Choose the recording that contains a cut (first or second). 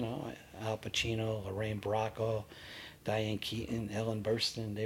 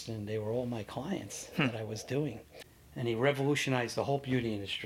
second